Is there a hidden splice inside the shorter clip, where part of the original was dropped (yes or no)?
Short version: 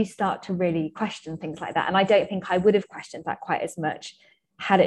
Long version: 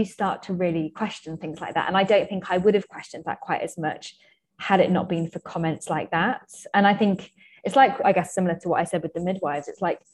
no